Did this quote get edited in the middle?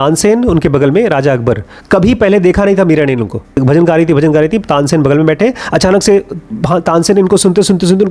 yes; 1 cut; at 3.4 s

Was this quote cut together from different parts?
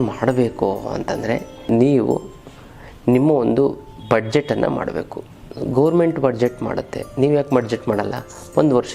yes; 1 cut; at 1.7 s

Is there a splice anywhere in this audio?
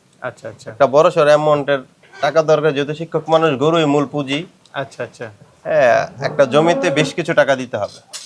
no; 0 cuts

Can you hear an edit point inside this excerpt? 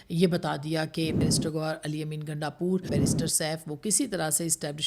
yes; 2 cuts; at 1.2 s, 2.9 s

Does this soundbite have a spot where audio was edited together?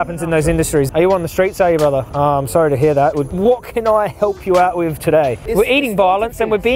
yes; 4 cuts; at 0.9 s, 2.1 s, 3.3 s, 5.4 s

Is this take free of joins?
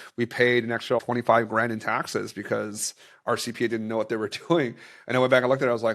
no; 1 cut; at 1.0 s

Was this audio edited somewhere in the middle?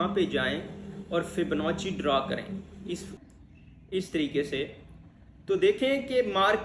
yes; 1 cut; at 3.1 s

